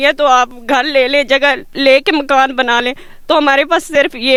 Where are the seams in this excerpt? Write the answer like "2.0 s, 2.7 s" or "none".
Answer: none